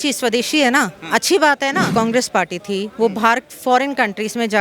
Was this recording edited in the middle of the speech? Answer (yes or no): yes